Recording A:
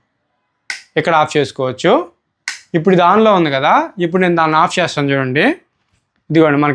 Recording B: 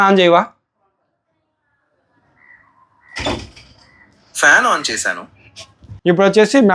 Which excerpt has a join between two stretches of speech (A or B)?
B